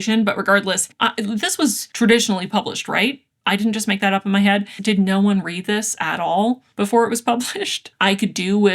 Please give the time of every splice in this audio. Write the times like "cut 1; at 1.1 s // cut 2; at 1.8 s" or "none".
cut 1; at 0.9 s // cut 2; at 4.7 s // cut 3; at 7.9 s